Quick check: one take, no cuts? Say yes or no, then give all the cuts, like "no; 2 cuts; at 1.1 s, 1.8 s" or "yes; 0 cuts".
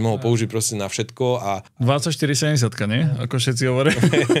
no; 1 cut; at 1.7 s